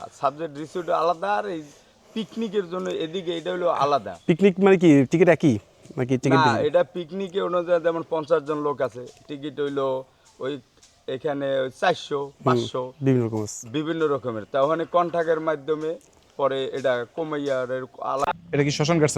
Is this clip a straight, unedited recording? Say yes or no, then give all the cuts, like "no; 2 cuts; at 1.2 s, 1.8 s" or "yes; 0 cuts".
no; 1 cut; at 18.2 s